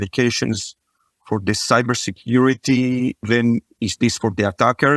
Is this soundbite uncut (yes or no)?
no